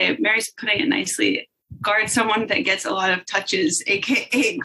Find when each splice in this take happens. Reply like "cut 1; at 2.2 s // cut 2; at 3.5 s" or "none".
none